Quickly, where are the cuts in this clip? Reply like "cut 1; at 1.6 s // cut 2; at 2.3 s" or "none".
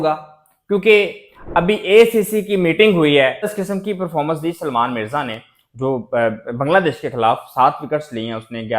cut 1; at 3.5 s